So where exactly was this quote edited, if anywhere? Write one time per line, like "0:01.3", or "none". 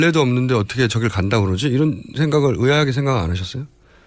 0:01.1